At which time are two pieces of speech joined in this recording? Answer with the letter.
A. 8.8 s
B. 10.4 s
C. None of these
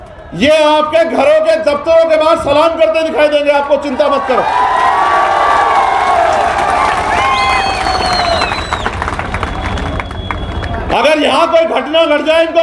C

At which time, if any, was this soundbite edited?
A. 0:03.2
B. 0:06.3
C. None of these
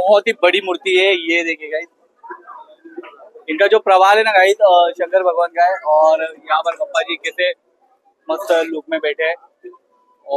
C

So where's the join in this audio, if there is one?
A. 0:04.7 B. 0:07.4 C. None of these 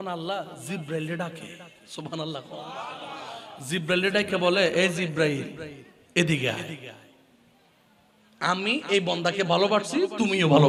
C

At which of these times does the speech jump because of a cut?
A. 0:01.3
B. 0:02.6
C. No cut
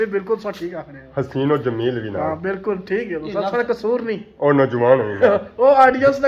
C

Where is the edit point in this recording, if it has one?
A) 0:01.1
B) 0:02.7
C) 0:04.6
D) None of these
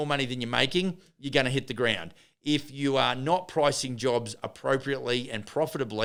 D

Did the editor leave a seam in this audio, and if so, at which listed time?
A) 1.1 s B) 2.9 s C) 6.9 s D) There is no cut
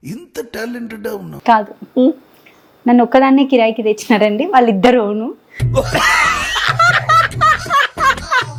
D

